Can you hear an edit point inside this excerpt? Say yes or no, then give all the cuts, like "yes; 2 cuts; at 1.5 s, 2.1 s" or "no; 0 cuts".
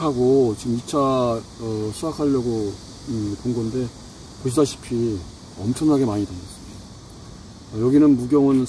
no; 0 cuts